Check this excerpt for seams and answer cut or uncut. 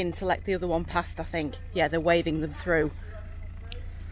uncut